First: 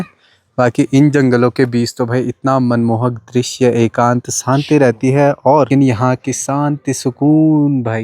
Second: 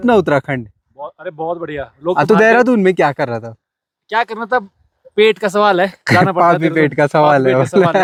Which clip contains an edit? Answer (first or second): first